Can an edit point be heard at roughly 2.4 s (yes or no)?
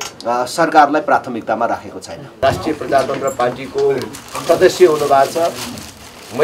yes